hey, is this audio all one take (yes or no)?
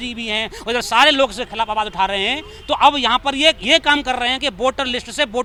yes